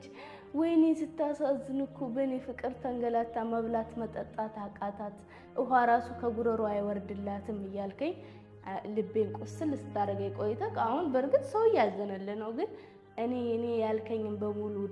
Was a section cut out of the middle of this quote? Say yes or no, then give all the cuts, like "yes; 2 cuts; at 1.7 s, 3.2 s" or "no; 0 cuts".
no; 0 cuts